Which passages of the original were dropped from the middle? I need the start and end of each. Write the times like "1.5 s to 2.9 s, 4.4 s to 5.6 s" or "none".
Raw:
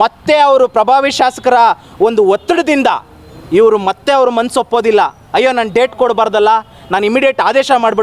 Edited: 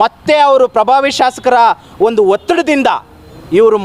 none